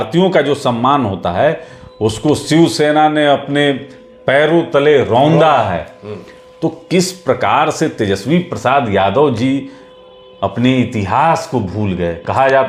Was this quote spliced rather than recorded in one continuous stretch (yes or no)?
no